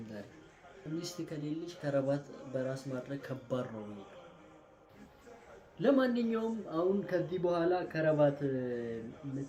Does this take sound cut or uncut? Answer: uncut